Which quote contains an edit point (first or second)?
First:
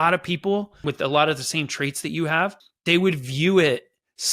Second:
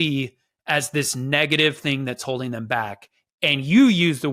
first